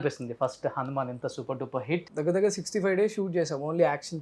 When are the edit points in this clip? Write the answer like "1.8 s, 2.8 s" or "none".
2.1 s